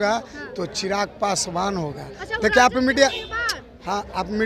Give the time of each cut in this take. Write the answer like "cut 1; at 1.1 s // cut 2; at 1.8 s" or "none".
none

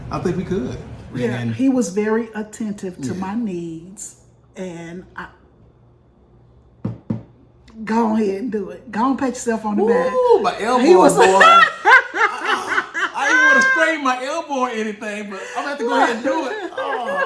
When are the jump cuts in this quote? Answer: cut 1; at 1.0 s

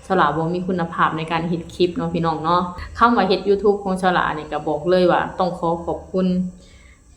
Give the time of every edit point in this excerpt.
cut 1; at 2.8 s

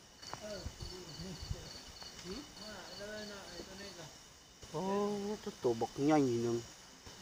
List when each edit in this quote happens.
none

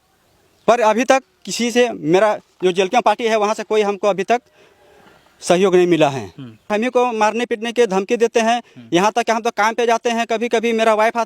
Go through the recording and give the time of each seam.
cut 1; at 6.7 s

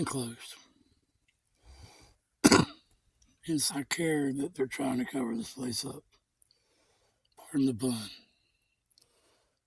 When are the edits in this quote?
cut 1; at 3.7 s

